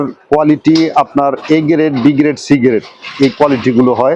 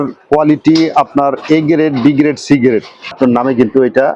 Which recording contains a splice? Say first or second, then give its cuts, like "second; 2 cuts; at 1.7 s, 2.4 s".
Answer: second; 1 cut; at 3.1 s